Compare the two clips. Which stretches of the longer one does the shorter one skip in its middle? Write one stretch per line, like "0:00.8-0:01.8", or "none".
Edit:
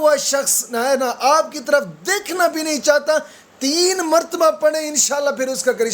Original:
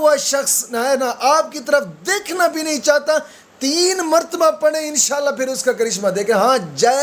none